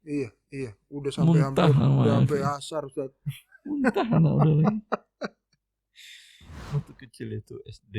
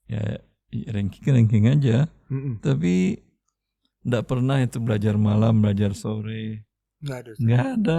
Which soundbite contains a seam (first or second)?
first